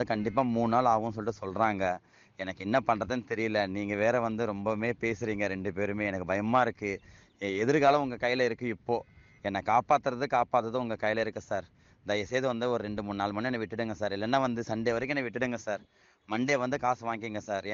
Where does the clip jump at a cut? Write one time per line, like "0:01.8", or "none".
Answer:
none